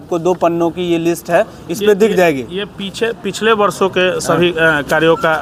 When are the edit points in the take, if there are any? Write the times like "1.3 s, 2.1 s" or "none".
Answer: none